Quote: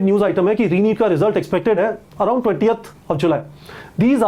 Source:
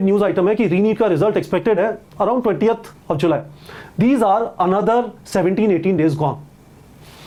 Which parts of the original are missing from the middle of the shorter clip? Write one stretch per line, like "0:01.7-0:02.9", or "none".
none